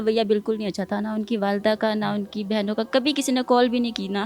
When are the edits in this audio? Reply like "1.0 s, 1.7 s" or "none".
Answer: none